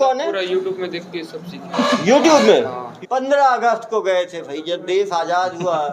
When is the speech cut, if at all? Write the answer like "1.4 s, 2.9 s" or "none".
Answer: 2.8 s